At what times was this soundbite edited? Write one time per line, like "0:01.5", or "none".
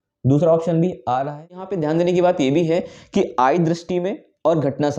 0:01.7